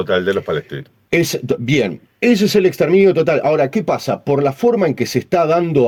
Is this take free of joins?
yes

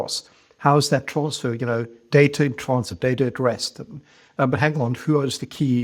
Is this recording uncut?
yes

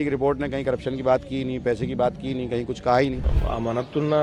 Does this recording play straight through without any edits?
no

